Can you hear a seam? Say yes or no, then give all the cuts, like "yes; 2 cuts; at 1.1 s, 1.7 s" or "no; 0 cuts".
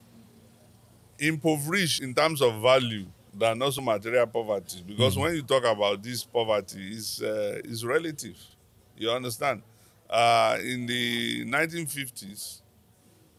no; 0 cuts